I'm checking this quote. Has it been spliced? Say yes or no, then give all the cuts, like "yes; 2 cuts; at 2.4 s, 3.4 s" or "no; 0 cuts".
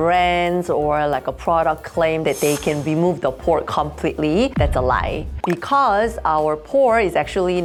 no; 0 cuts